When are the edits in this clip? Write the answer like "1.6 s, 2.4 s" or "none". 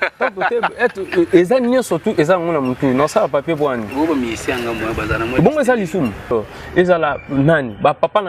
6.3 s